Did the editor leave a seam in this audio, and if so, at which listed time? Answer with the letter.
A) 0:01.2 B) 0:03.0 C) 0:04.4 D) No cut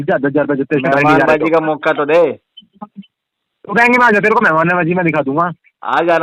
D